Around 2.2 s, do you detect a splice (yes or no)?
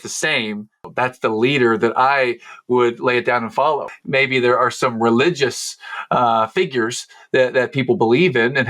no